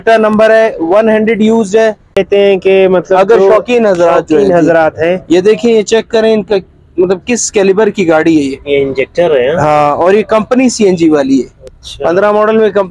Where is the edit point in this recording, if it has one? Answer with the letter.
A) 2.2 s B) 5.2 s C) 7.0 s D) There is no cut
A